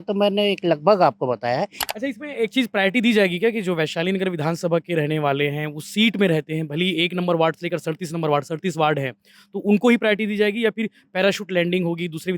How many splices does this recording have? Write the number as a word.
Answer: one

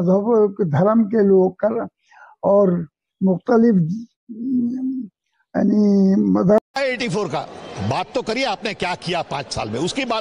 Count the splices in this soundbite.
one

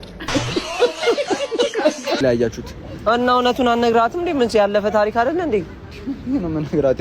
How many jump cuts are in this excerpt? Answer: one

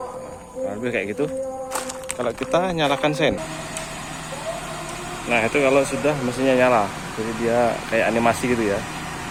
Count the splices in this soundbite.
zero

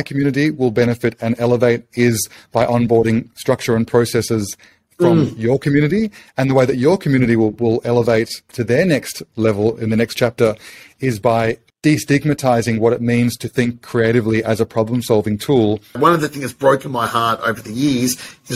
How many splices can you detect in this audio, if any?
three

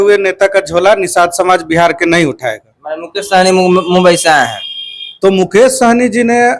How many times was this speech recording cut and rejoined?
zero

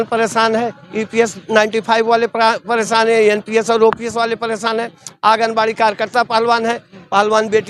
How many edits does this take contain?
zero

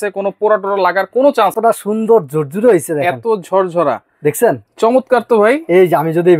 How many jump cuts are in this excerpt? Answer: one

